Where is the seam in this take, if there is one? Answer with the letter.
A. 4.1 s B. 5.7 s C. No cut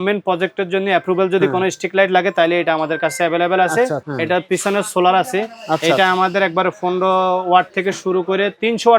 A